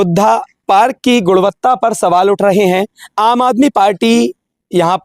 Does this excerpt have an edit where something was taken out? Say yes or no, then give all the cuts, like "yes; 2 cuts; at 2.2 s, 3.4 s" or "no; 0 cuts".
yes; 1 cut; at 3.0 s